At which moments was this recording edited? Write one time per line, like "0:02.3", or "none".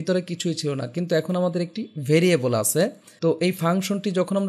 0:03.1